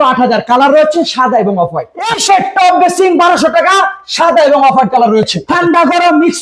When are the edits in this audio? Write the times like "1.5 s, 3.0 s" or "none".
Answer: 2.2 s, 5.4 s